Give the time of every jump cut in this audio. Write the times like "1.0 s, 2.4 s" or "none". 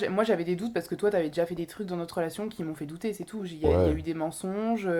none